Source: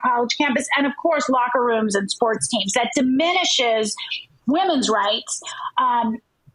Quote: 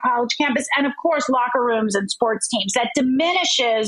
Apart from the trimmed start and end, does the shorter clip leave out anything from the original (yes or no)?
no